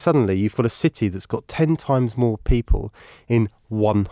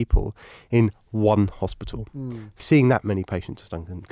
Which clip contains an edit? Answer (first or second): second